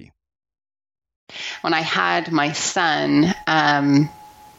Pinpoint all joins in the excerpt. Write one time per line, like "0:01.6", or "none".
0:01.5

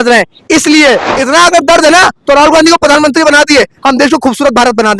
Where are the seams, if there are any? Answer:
0:01.1

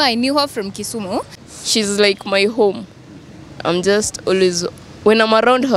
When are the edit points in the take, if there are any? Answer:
0:01.4

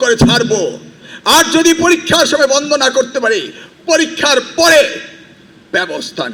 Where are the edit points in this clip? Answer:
none

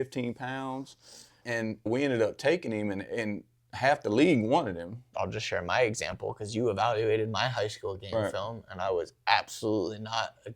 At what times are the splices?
0:01.5
0:05.1

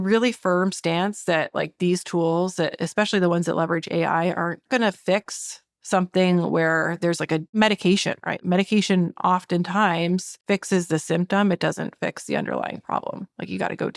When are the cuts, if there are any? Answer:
0:04.6
0:07.5
0:08.4
0:10.3

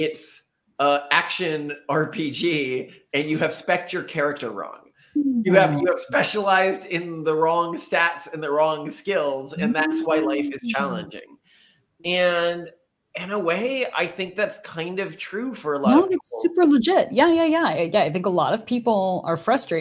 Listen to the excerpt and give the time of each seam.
none

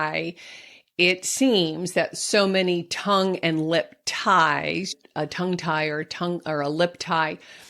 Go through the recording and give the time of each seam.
0:04.9

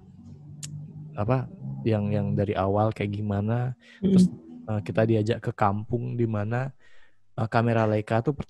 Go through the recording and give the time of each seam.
none

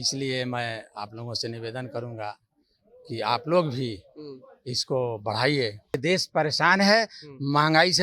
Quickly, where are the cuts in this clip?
0:06.0

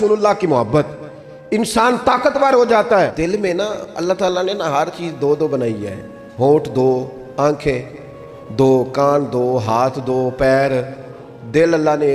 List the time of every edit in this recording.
0:03.1

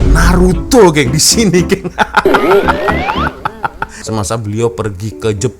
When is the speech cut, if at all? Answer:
0:03.9

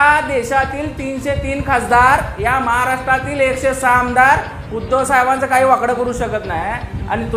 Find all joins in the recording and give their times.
none

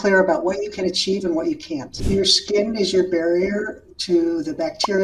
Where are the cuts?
0:02.0

